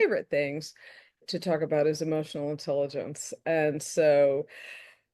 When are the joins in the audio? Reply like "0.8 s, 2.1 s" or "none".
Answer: 1.2 s